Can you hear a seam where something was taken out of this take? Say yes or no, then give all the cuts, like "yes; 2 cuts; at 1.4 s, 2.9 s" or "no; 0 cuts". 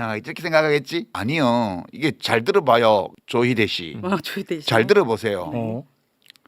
yes; 2 cuts; at 1.1 s, 3.2 s